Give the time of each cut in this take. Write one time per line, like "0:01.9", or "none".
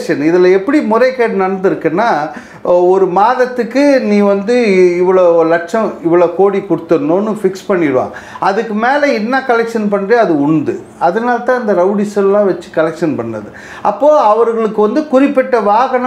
none